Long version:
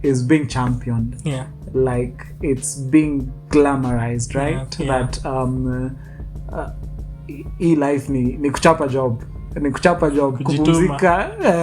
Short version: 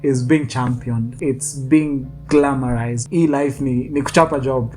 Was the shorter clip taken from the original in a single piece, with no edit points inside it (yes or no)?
no